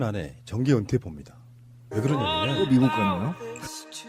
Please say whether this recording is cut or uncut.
uncut